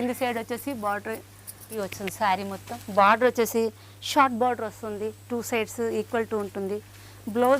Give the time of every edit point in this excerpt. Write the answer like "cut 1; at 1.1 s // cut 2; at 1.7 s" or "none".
cut 1; at 1.7 s